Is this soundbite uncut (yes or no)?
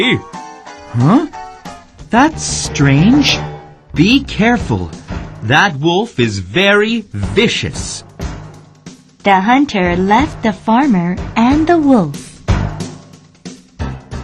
yes